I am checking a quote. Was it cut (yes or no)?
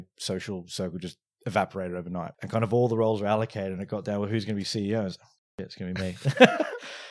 yes